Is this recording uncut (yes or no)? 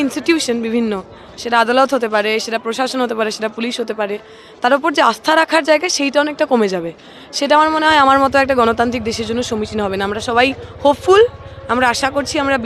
yes